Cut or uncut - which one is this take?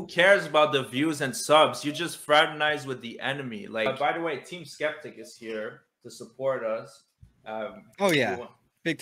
cut